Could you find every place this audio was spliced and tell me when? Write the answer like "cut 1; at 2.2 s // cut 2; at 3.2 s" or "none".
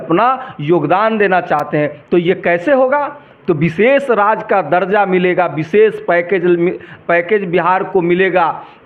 none